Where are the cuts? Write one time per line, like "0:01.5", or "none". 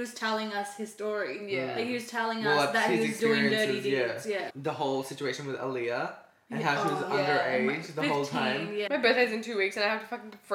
0:04.5
0:08.9

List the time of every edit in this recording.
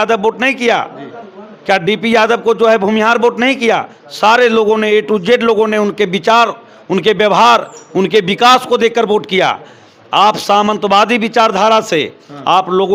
none

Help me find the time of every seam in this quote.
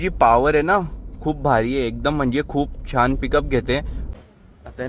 0:04.0

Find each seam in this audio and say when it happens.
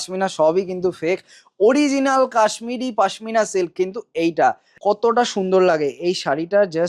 0:04.7

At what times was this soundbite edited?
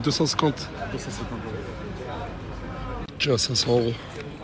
0:03.4

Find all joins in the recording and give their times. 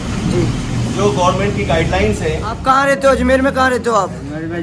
0:02.6

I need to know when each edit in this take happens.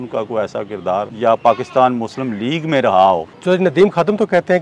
0:01.1
0:03.3

